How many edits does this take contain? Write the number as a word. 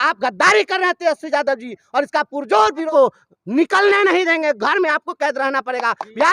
one